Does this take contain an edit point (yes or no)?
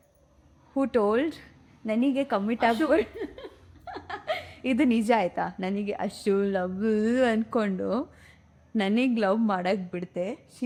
no